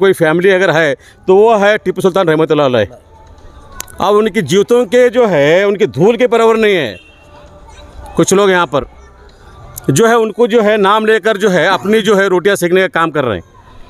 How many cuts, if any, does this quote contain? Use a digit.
0